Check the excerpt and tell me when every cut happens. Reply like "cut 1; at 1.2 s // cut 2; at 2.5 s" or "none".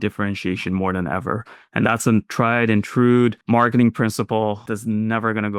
cut 1; at 3.4 s // cut 2; at 4.7 s